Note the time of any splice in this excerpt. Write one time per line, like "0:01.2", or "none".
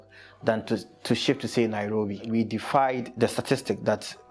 0:02.3
0:03.1